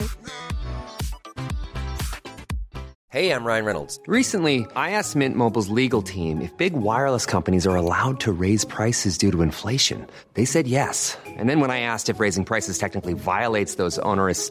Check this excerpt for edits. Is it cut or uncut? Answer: cut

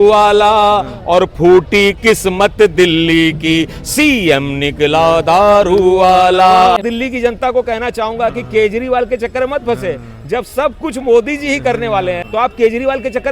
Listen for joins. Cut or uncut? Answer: cut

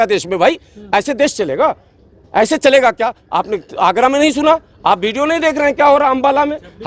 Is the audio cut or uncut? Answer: uncut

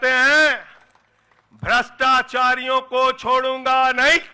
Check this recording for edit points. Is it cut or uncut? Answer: uncut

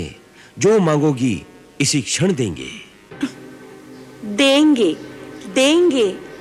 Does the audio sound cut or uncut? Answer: uncut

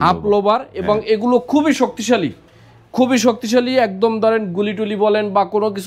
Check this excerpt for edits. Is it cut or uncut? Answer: uncut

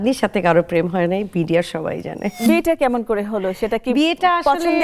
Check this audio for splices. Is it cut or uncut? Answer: cut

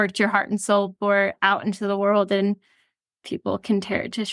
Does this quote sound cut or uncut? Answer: uncut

